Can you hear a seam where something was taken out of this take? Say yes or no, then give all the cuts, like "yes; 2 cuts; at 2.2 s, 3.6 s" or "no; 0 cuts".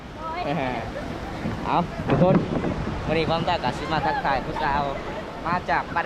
yes; 1 cut; at 1.4 s